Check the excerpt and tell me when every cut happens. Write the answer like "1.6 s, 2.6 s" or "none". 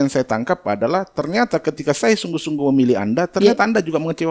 none